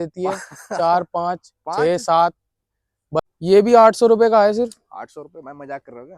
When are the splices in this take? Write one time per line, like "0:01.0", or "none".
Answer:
0:03.2